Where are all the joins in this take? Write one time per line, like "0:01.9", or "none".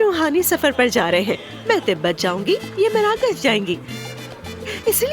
none